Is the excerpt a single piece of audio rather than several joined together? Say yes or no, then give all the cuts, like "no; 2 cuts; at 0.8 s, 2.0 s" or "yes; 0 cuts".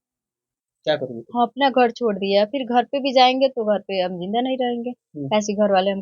yes; 0 cuts